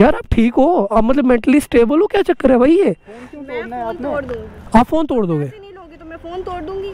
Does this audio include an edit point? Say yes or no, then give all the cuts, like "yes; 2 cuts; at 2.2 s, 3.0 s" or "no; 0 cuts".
no; 0 cuts